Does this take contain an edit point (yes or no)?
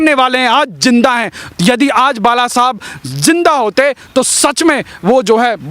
no